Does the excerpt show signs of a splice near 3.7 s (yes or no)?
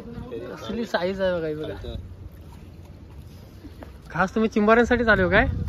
no